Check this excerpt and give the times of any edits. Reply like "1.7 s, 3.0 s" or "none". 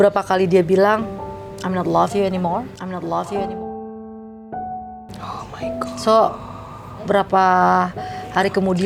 none